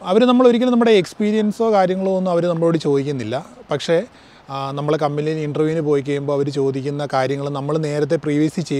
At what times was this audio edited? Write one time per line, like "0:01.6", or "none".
none